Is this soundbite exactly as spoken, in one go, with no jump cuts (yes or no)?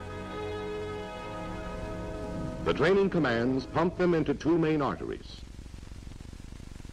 no